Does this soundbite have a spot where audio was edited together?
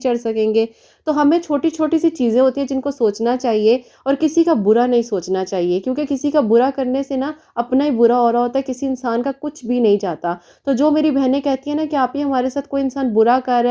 no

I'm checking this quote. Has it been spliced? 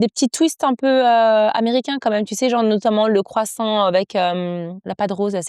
no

